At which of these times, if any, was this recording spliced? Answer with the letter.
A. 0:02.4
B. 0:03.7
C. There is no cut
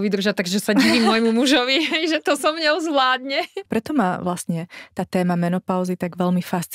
B